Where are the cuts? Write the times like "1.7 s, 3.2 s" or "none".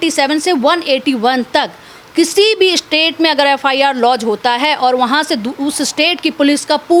none